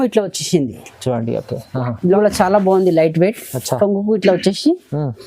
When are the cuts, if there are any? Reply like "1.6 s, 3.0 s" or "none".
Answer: 2.1 s